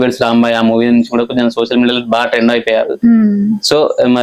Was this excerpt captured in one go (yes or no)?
yes